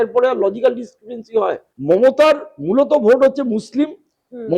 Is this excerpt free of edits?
no; 1 cut; at 1.7 s

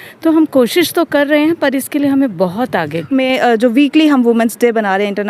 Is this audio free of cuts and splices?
no; 1 cut; at 3.0 s

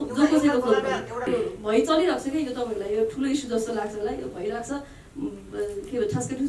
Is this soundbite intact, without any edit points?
no; 1 cut; at 1.3 s

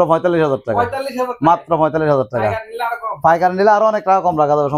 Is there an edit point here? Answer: no; 0 cuts

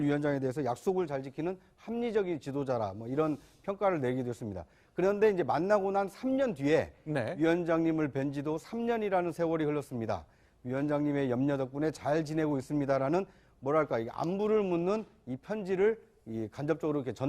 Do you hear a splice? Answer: yes; 1 cut; at 12.8 s

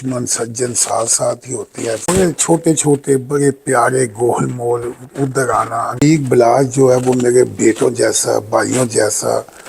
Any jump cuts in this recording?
yes; 2 cuts; at 2.0 s, 6.0 s

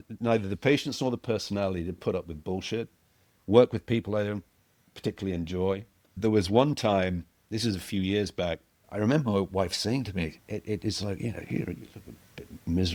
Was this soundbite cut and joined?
no; 0 cuts

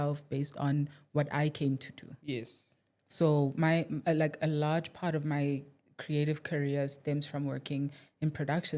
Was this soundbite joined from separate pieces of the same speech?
no; 0 cuts

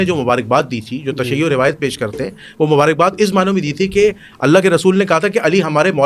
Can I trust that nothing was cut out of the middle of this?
yes; 0 cuts

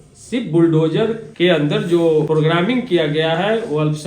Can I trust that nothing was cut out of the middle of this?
no; 2 cuts; at 1.2 s, 2.3 s

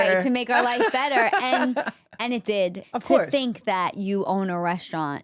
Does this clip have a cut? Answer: yes; 1 cut; at 2.8 s

